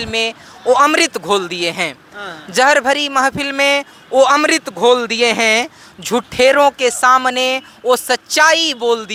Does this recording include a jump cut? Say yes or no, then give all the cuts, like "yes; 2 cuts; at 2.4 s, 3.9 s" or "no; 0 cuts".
no; 0 cuts